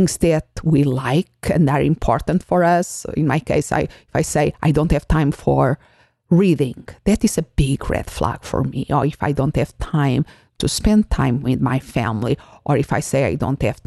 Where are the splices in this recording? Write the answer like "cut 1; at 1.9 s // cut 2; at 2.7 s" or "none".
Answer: none